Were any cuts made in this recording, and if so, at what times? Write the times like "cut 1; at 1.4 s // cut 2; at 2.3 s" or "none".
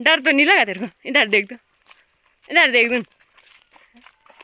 none